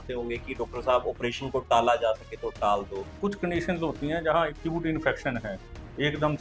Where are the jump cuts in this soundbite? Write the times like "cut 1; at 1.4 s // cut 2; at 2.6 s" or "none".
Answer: cut 1; at 3.1 s